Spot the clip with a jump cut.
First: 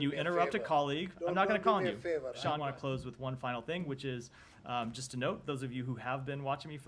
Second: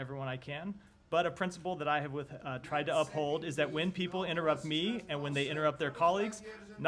first; 1 cut; at 2.6 s

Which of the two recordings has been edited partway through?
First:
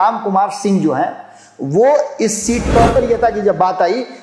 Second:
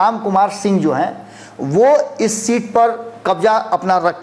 first; 1 cut; at 3.0 s

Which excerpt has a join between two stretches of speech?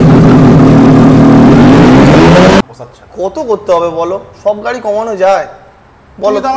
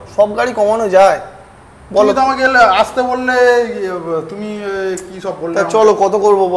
first; 1 cut; at 2.6 s

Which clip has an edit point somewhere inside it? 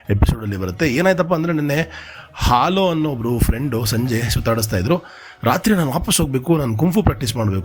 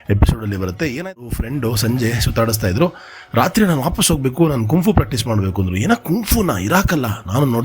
second; 1 cut; at 1.0 s

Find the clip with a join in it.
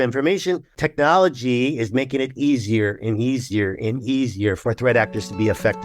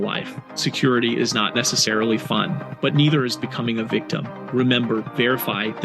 first; 2 cuts; at 0.8 s, 4.6 s

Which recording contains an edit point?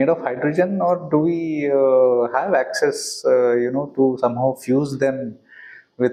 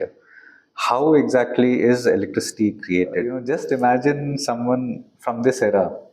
second; 1 cut; at 3.4 s

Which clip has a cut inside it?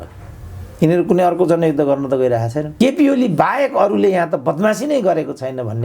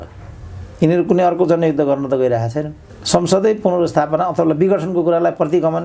first; 1 cut; at 2.6 s

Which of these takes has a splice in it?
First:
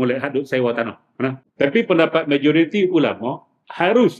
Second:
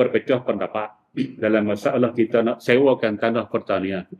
first; 1 cut; at 1.4 s

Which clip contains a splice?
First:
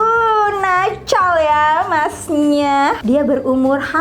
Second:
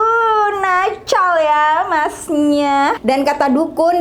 second; 1 cut; at 3.0 s

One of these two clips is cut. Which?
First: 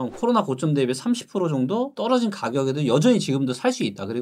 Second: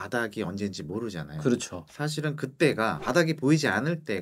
second; 1 cut; at 3.0 s

